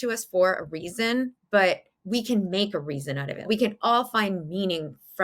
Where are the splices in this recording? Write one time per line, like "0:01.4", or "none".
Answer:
0:01.4
0:03.5